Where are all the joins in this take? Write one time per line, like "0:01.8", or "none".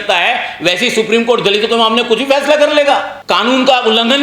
0:03.1